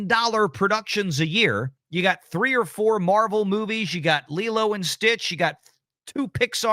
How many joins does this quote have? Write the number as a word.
one